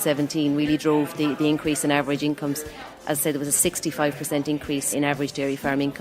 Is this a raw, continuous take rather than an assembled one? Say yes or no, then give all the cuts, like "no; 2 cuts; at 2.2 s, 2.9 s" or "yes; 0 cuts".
no; 1 cut; at 4.9 s